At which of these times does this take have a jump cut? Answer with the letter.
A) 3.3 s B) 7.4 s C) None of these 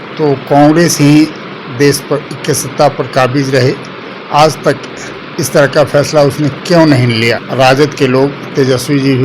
B